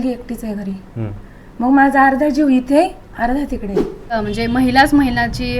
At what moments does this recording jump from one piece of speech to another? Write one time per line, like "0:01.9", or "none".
0:04.1